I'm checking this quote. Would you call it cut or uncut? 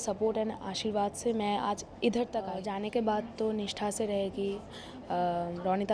cut